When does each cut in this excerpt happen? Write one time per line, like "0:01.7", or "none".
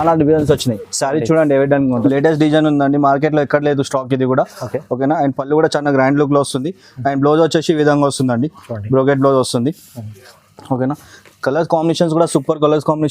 0:02.0